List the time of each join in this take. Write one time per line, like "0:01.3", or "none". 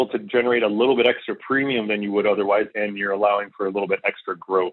0:02.7